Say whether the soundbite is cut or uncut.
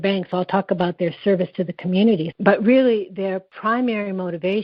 cut